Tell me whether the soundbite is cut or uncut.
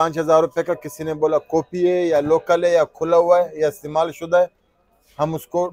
uncut